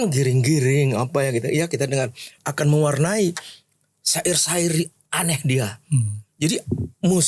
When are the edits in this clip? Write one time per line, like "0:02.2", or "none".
0:02.3